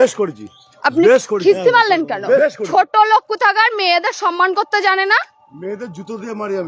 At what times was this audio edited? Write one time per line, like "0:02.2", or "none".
0:02.4